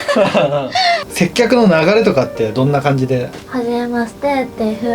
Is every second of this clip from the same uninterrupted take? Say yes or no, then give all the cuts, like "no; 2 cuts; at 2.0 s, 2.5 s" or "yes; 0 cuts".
no; 2 cuts; at 1.1 s, 3.4 s